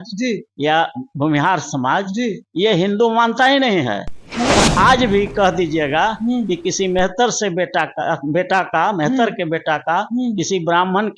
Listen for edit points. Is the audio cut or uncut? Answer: cut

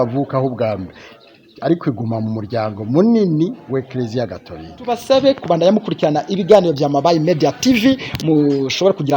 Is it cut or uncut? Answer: cut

